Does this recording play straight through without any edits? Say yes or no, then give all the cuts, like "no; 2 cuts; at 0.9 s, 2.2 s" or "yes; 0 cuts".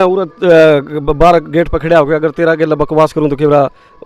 yes; 0 cuts